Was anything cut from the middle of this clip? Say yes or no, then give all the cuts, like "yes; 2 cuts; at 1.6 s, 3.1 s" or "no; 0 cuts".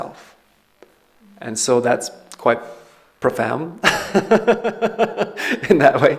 no; 0 cuts